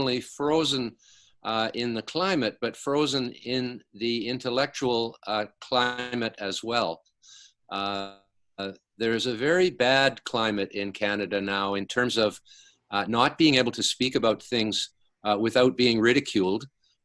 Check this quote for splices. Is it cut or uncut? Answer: uncut